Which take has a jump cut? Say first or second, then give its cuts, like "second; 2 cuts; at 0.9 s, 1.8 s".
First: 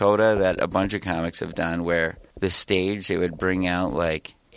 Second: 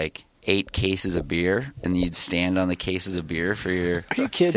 first; 1 cut; at 2.2 s